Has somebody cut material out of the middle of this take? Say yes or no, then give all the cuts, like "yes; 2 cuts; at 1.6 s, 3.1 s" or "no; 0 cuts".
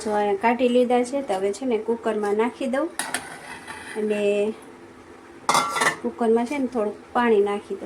no; 0 cuts